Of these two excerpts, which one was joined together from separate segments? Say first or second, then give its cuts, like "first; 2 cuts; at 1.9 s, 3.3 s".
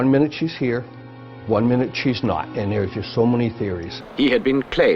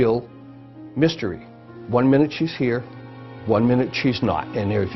first; 1 cut; at 4.0 s